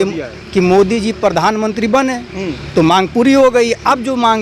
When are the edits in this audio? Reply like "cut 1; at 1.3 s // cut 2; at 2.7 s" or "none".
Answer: none